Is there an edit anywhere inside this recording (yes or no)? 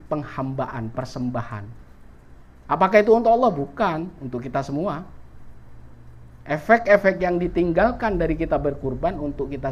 no